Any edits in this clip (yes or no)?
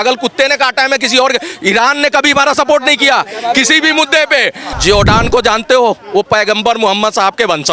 yes